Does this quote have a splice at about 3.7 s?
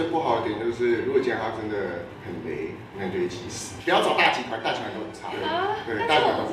yes; 1 cut; at 3.7 s

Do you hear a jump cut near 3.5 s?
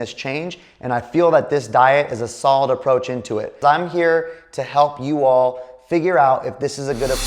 yes; 1 cut; at 3.5 s

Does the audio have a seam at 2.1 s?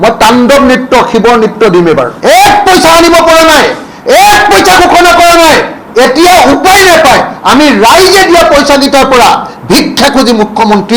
yes; 1 cut; at 2.1 s

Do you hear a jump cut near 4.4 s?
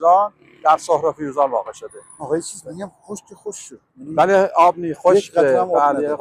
no; 0 cuts

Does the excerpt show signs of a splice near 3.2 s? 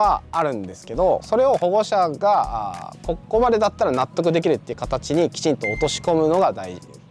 no; 1 cut; at 1.2 s

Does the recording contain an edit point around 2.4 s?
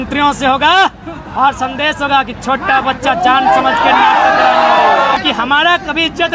no; 1 cut; at 5.2 s

